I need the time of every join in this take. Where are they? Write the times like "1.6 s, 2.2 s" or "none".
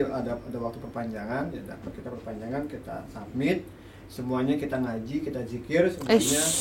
none